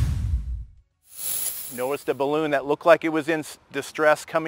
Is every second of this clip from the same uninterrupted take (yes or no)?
yes